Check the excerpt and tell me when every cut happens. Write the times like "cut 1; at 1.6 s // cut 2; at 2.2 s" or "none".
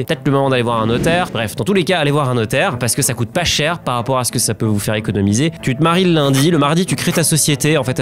cut 1; at 1.4 s // cut 2; at 5.6 s